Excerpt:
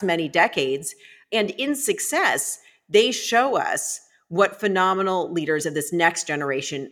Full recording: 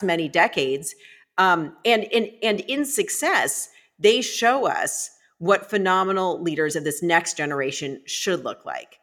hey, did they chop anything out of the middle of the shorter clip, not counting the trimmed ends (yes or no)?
yes